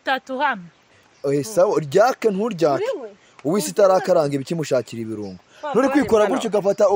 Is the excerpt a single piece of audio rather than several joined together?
yes; 0 cuts

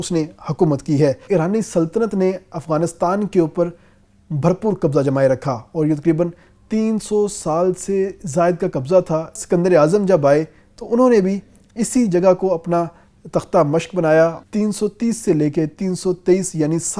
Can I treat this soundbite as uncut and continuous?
no; 3 cuts; at 1.2 s, 9.4 s, 14.4 s

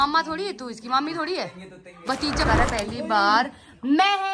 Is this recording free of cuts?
no; 1 cut; at 2.4 s

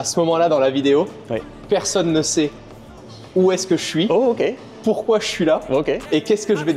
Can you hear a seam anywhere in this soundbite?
no; 0 cuts

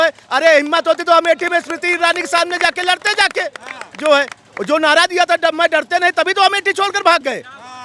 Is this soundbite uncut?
yes; 0 cuts

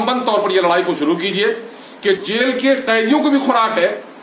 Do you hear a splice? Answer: yes; 1 cut; at 2.2 s

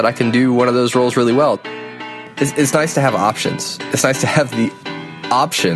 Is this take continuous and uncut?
no; 1 cut; at 1.6 s

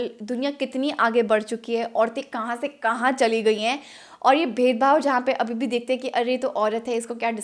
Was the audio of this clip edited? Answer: no; 0 cuts

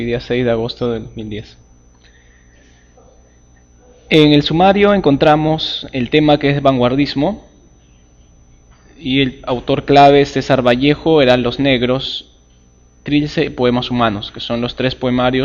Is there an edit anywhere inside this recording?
yes; 1 cut; at 13.5 s

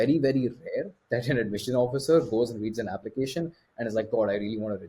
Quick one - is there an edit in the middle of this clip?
no; 0 cuts

